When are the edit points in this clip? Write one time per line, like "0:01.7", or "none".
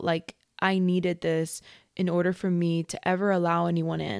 none